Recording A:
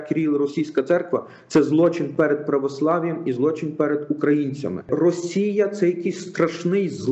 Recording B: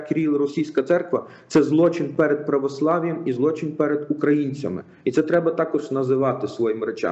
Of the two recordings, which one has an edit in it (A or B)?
A